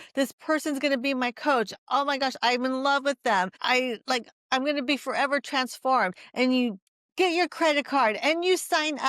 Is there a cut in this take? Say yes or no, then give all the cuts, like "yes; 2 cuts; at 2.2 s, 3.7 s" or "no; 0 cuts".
yes; 1 cut; at 3.6 s